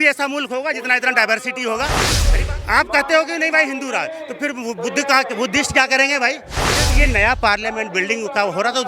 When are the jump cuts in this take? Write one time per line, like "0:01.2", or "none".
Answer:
0:02.2
0:06.9